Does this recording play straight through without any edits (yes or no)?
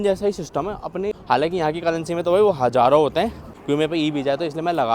no